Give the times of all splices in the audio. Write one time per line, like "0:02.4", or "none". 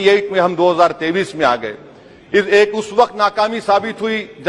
none